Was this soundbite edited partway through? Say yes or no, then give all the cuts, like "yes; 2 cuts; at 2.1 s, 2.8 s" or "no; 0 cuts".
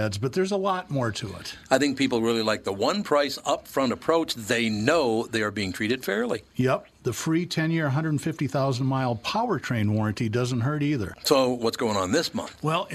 no; 0 cuts